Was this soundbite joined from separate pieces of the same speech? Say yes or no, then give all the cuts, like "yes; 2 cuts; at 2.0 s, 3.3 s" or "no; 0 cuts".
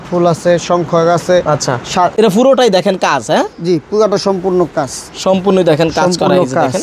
yes; 1 cut; at 2.1 s